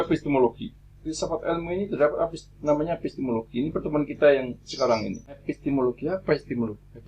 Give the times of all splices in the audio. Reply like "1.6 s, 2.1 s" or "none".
5.4 s